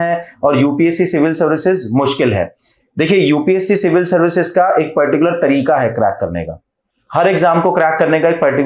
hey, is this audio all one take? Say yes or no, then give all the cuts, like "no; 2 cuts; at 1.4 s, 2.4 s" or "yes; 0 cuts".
yes; 0 cuts